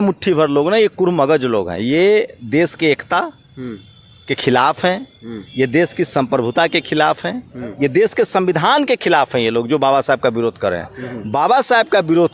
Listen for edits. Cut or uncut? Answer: uncut